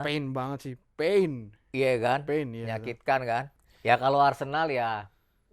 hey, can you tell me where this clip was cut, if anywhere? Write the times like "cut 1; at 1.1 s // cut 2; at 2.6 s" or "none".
cut 1; at 3.6 s